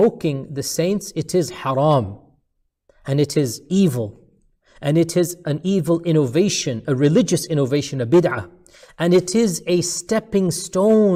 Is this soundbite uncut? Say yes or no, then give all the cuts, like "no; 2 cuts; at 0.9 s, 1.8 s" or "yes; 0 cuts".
yes; 0 cuts